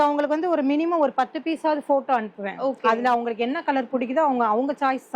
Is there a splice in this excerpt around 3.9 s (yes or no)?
no